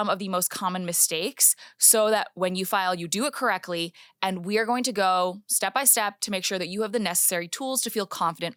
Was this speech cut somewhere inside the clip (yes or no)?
no